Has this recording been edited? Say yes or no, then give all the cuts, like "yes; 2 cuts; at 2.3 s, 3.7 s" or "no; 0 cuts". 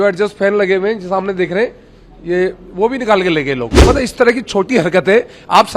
yes; 1 cut; at 3.7 s